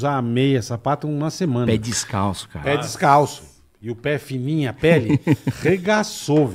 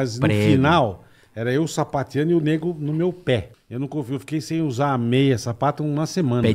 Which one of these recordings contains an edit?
second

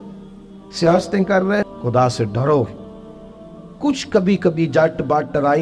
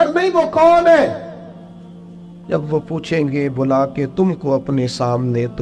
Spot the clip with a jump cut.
first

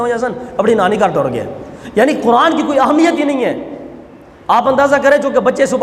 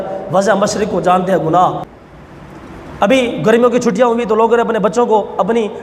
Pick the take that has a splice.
second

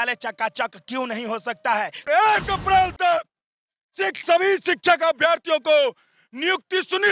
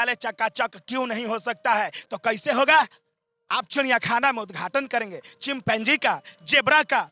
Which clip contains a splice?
first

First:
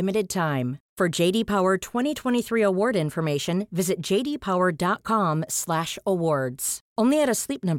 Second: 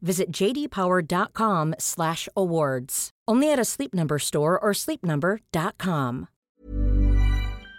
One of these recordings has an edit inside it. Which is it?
second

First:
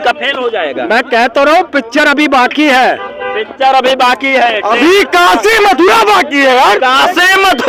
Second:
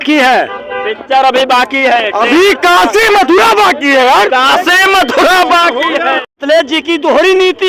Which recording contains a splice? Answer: second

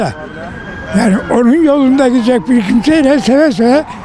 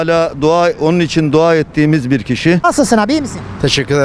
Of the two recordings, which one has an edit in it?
second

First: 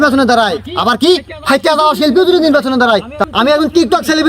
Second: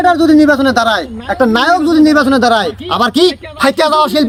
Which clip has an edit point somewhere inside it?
first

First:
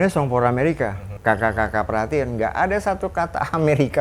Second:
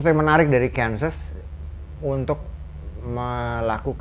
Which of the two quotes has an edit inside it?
first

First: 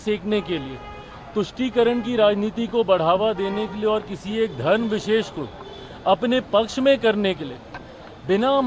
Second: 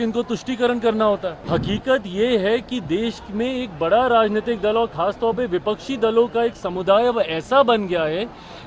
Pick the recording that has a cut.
second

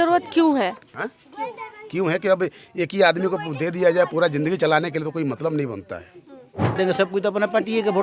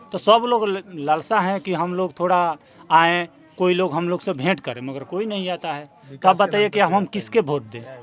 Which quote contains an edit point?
first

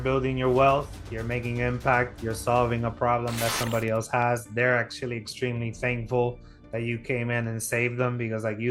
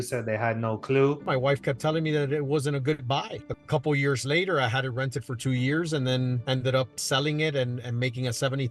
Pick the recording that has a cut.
second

